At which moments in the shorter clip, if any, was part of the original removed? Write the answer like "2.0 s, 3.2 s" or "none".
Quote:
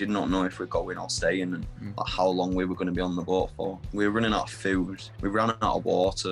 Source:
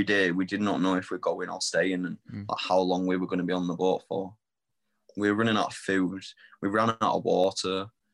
3.8 s, 5.0 s